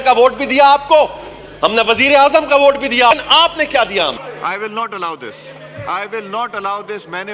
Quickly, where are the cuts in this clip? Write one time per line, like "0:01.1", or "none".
0:03.1